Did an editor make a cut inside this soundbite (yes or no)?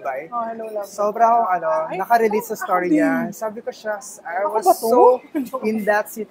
no